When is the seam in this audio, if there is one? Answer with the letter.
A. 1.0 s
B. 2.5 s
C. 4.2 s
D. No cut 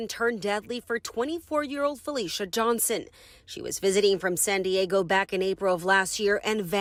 D